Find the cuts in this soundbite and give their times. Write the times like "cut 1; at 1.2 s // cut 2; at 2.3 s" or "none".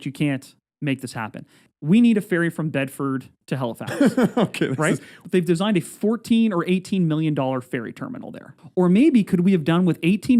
cut 1; at 1.6 s // cut 2; at 3.4 s // cut 3; at 5.1 s // cut 4; at 8.6 s